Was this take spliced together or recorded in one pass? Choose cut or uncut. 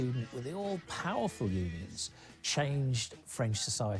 uncut